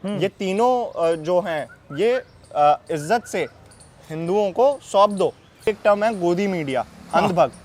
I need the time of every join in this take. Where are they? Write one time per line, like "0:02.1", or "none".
0:05.7